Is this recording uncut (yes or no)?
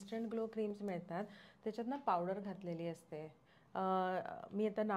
yes